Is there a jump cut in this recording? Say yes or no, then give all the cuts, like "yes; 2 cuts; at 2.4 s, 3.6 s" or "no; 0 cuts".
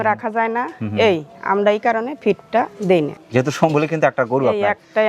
no; 0 cuts